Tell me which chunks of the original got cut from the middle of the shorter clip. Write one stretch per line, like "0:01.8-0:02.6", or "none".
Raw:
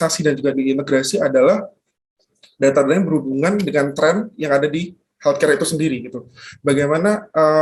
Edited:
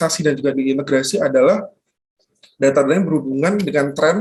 none